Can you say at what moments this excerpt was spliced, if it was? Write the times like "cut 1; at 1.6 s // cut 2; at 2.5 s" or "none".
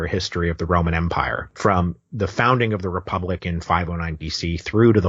cut 1; at 1.4 s